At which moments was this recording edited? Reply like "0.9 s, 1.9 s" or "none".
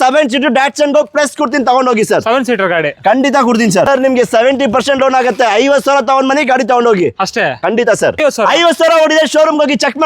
3.9 s, 8.2 s